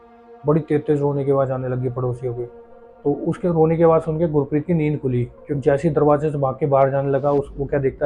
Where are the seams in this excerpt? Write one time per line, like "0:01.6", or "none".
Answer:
0:05.4